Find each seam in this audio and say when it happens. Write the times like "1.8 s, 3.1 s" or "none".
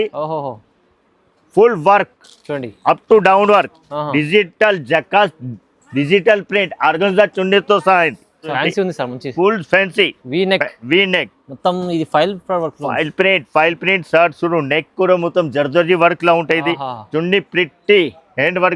8.5 s